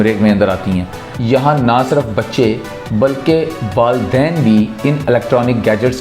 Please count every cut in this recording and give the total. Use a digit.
1